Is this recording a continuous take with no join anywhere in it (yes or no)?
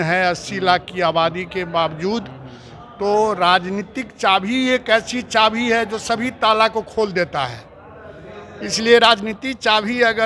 yes